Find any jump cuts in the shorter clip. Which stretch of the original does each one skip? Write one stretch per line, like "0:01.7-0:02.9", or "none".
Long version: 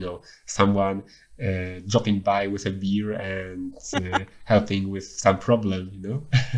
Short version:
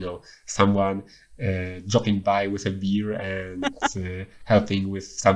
none

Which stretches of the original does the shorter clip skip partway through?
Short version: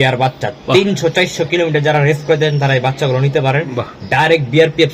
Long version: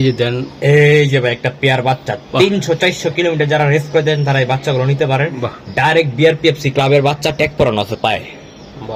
none

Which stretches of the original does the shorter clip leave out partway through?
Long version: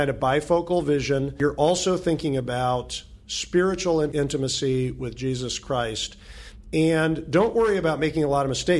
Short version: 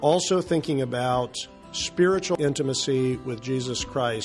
0:03.9-0:04.1

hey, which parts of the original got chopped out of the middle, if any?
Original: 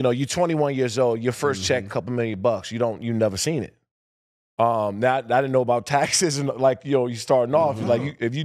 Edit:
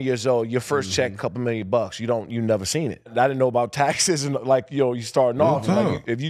0:03.8-0:05.2

